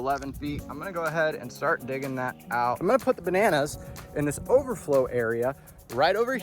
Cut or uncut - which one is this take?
cut